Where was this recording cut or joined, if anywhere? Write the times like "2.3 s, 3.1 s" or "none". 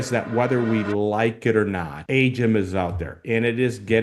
1.9 s

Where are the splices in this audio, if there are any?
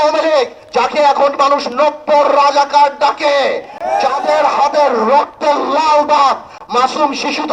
none

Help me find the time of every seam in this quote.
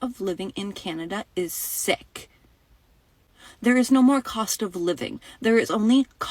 none

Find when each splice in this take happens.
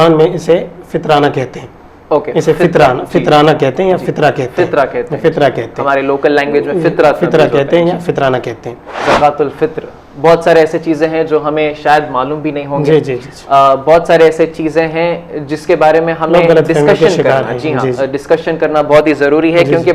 9.0 s

